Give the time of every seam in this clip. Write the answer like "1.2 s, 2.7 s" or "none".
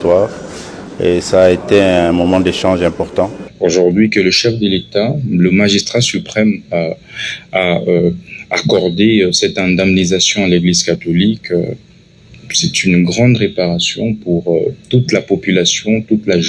3.4 s